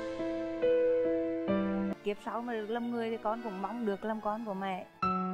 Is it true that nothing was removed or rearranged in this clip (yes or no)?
no